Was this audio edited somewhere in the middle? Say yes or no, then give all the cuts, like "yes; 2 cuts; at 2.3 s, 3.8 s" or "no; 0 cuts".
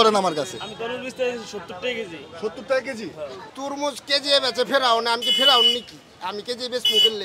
yes; 1 cut; at 3.4 s